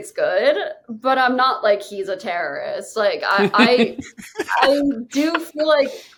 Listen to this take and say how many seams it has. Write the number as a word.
zero